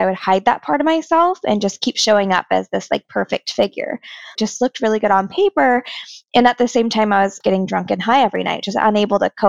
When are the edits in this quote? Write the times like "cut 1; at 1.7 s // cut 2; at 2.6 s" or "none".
cut 1; at 4.4 s // cut 2; at 7.4 s